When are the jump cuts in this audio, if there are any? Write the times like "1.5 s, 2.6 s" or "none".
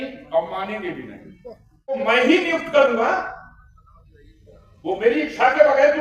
2.0 s